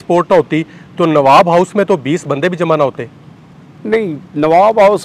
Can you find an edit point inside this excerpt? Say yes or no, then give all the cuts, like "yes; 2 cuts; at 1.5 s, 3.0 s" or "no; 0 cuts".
no; 0 cuts